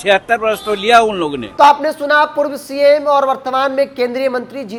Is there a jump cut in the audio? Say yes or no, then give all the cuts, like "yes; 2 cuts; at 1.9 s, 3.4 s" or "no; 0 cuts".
no; 0 cuts